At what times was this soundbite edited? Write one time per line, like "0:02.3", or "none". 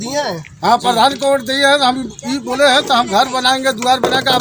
none